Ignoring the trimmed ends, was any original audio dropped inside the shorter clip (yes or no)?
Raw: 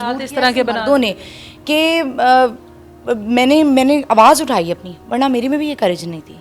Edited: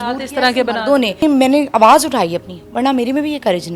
yes